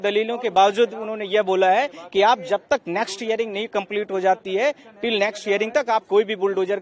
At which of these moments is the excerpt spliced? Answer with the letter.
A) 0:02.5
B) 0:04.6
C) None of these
C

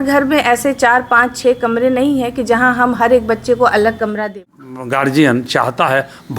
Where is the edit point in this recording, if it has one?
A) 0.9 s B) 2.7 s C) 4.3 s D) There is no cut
C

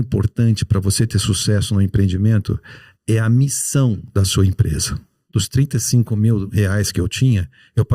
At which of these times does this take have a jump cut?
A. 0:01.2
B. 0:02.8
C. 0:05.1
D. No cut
C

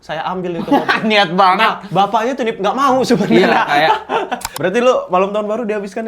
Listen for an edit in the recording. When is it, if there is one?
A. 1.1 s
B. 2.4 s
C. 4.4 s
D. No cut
C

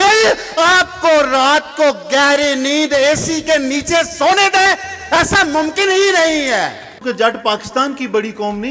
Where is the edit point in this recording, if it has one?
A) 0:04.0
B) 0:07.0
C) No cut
B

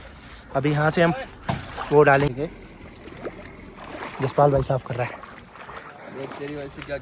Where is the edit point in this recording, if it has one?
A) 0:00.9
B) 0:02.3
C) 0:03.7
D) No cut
B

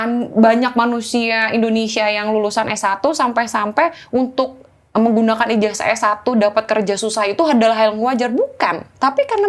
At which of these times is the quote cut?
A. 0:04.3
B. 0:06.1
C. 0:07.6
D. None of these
D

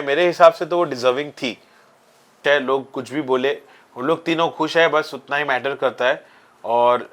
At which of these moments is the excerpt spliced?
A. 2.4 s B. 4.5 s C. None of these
A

